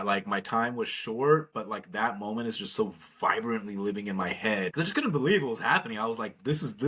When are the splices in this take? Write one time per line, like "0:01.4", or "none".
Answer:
0:04.7